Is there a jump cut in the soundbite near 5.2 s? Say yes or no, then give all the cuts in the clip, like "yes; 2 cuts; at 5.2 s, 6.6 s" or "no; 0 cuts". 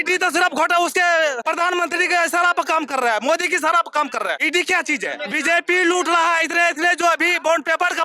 yes; 3 cuts; at 1.4 s, 4.4 s, 5.2 s